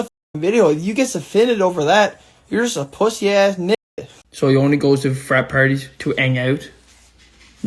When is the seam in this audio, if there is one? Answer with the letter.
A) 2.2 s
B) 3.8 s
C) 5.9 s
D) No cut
B